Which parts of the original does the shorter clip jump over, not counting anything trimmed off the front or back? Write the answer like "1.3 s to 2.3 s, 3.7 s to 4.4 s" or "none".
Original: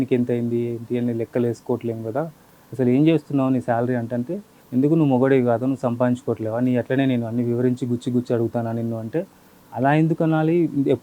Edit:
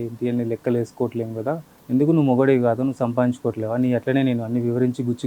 2.4 s to 4.5 s